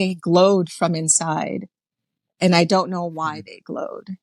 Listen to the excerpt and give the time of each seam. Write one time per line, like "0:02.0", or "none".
none